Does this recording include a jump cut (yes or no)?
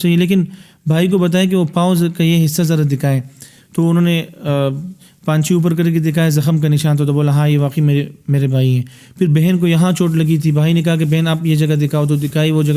no